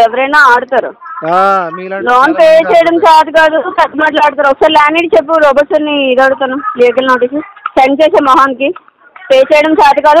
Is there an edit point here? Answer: no; 0 cuts

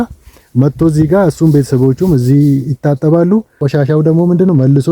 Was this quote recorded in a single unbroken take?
no; 1 cut; at 3.6 s

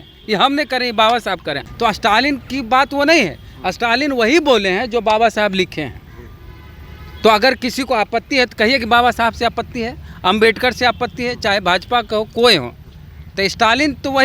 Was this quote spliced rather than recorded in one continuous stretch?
yes; 1 cut; at 1.6 s

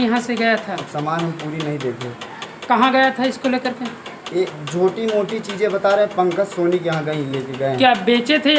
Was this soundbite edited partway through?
no; 0 cuts

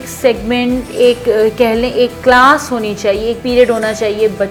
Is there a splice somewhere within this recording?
no; 0 cuts

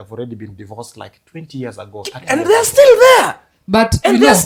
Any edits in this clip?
no; 0 cuts

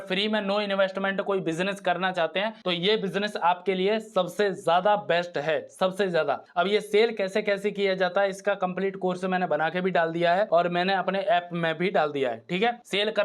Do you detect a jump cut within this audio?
no; 0 cuts

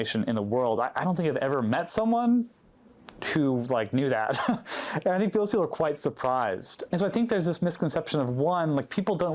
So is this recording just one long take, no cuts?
yes; 0 cuts

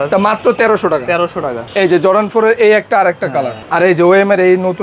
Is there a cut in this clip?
yes; 2 cuts; at 1.6 s, 3.6 s

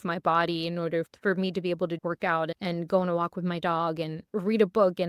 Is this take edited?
yes; 3 cuts; at 1.1 s, 2.1 s, 4.2 s

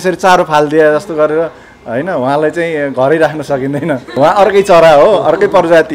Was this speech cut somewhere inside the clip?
yes; 1 cut; at 4.1 s

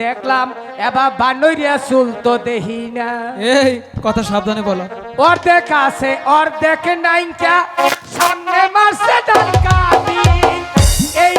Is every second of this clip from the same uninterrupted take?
yes; 0 cuts

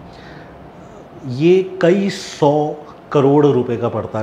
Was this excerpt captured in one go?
yes; 0 cuts

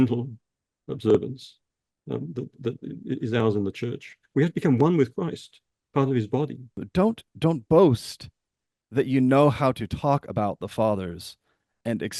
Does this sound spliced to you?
yes; 1 cut; at 6.8 s

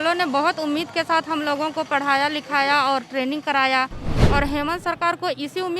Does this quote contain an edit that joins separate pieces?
yes; 1 cut; at 4.1 s

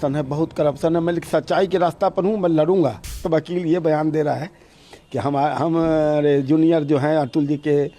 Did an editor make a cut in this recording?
yes; 1 cut; at 3.2 s

